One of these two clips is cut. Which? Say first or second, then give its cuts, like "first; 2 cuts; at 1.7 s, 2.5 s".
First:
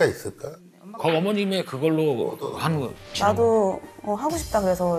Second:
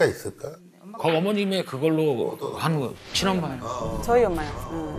first; 1 cut; at 3.0 s